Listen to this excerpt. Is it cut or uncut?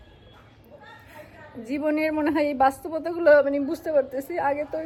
uncut